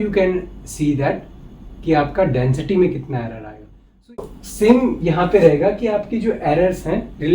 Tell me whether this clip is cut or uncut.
cut